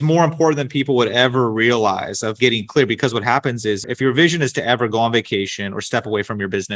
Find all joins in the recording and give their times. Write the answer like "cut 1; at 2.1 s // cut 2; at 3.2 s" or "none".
cut 1; at 2.3 s